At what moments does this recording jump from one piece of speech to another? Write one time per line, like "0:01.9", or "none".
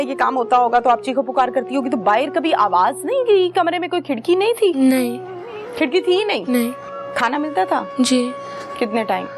none